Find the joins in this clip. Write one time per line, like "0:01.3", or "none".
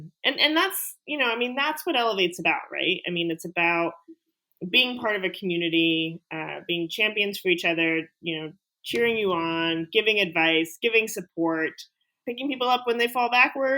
0:12.1